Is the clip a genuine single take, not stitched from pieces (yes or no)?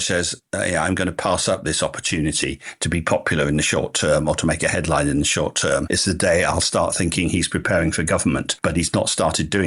yes